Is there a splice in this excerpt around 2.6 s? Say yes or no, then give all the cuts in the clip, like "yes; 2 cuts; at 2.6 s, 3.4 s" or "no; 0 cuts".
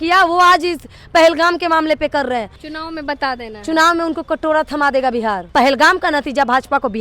yes; 2 cuts; at 2.6 s, 5.4 s